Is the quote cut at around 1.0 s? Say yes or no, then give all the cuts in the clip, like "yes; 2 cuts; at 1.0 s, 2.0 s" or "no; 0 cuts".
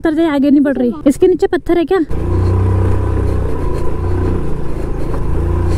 yes; 2 cuts; at 1.0 s, 2.1 s